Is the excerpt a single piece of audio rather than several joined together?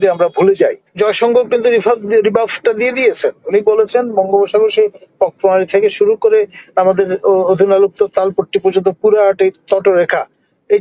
no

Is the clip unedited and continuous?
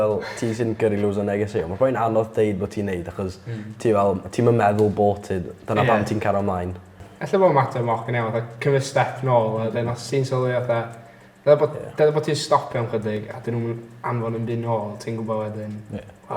yes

